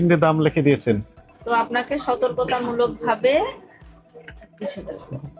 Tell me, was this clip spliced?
yes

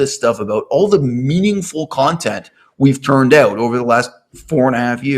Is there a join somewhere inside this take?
no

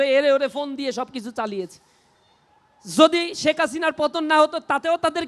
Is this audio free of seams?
yes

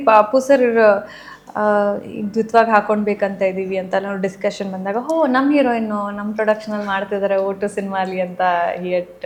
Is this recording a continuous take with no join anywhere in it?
yes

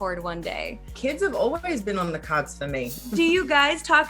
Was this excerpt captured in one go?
no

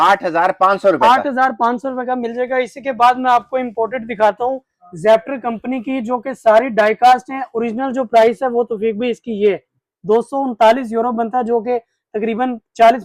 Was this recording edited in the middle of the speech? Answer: no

